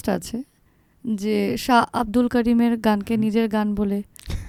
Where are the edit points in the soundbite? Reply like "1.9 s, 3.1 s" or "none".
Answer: none